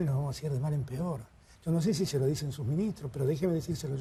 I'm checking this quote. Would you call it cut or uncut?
uncut